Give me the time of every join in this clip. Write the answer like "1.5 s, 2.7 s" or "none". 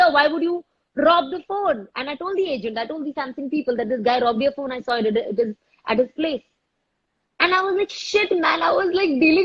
none